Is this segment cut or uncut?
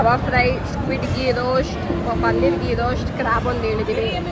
uncut